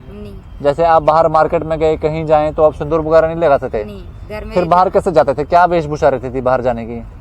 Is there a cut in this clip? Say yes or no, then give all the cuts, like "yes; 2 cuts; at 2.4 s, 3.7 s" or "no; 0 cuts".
no; 0 cuts